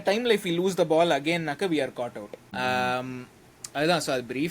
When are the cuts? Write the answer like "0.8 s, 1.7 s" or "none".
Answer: 2.5 s